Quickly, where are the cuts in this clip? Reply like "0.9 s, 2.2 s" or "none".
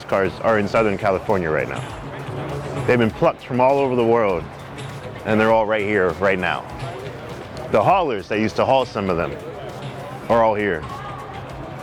none